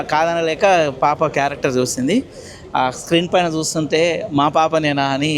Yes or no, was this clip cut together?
no